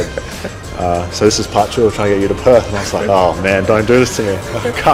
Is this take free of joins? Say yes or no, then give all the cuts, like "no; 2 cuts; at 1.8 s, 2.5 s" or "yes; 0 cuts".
yes; 0 cuts